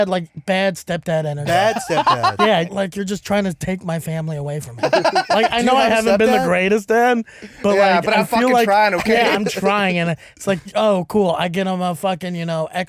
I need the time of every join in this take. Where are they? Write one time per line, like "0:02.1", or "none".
0:02.7
0:04.8
0:10.7